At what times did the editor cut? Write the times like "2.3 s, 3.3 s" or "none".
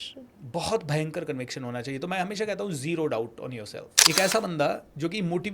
3.9 s